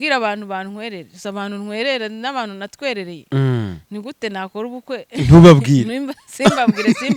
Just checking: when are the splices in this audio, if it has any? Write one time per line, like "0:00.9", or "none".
none